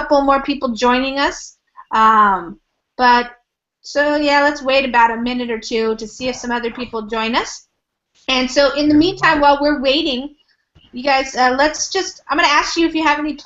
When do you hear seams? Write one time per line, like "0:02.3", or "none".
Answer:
0:04.1